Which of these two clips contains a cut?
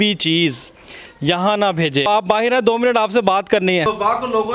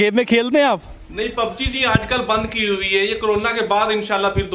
first; 2 cuts; at 2.1 s, 3.9 s

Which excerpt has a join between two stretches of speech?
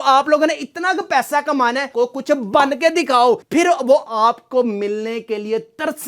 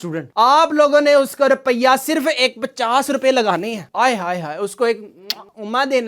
first; 1 cut; at 1.9 s

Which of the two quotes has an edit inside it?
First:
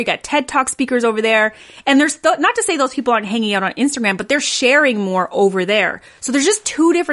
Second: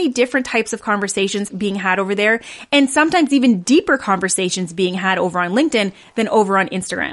second; 1 cut; at 1.5 s

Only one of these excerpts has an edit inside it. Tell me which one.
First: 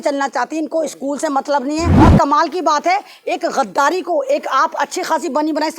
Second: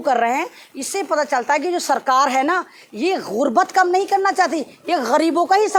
first; 1 cut; at 1.9 s

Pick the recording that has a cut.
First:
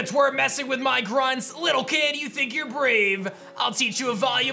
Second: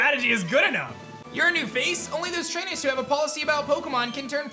second; 1 cut; at 1.1 s

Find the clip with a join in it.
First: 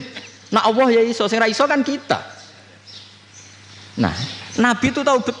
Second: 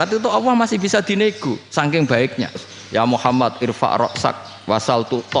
second; 1 cut; at 2.7 s

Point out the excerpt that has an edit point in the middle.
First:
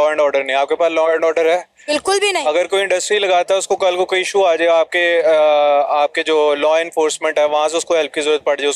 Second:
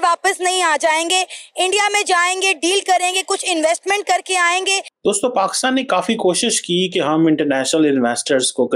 second; 1 cut; at 4.9 s

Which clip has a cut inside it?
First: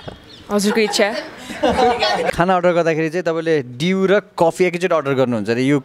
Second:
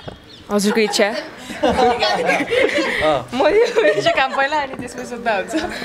first; 1 cut; at 2.3 s

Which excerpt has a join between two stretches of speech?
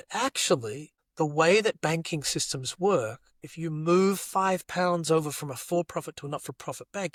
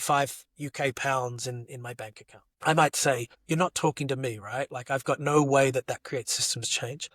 second; 1 cut; at 3.3 s

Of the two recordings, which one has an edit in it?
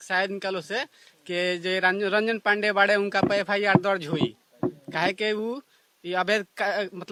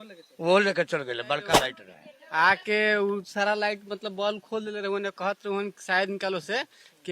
second; 1 cut; at 1.6 s

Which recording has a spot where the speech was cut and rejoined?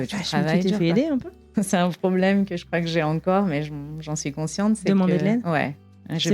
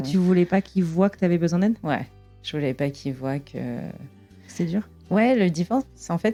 first; 1 cut; at 1.5 s

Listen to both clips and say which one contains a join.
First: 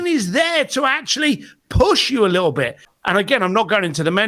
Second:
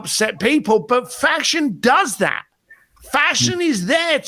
first; 1 cut; at 2.8 s

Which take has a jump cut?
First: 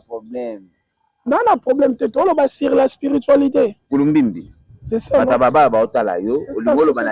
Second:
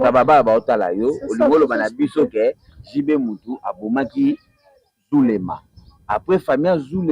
first; 1 cut; at 3.9 s

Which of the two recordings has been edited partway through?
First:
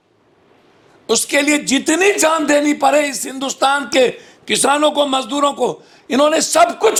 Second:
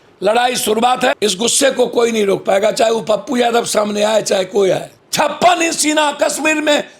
second; 2 cuts; at 1.1 s, 5.0 s

